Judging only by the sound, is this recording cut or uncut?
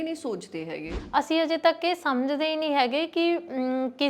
cut